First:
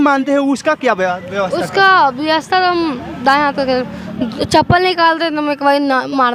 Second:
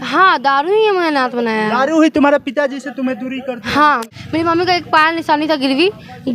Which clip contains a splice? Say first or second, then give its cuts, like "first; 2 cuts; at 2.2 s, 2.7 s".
second; 1 cut; at 4.1 s